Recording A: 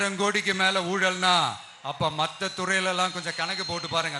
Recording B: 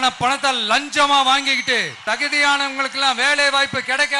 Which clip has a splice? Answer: B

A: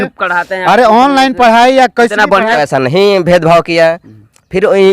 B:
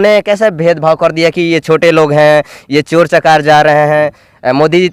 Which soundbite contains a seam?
A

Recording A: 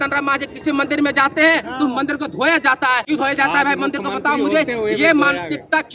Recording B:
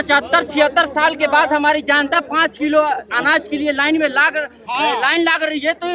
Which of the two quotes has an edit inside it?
A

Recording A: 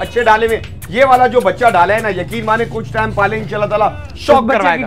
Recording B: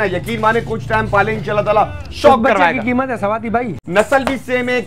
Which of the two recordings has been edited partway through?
B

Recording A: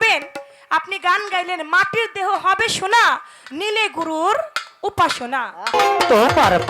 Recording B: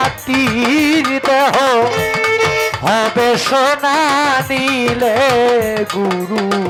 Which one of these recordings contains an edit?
A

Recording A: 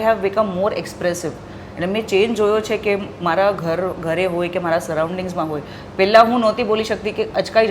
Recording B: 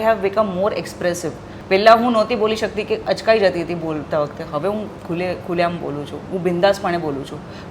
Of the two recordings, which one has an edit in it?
B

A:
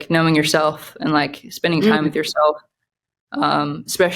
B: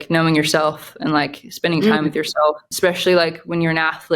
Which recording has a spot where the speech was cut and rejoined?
B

